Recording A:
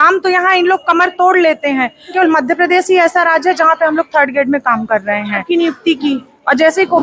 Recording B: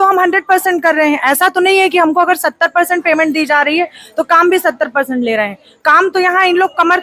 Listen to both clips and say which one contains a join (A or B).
A